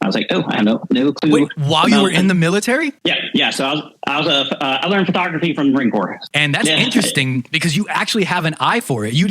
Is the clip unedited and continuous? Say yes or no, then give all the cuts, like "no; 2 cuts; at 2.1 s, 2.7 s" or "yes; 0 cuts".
no; 1 cut; at 6.2 s